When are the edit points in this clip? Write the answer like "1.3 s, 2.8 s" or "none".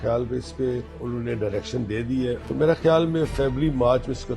0.9 s, 2.4 s